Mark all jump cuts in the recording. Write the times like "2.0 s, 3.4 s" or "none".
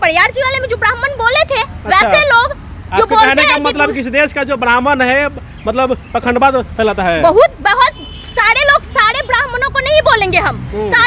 none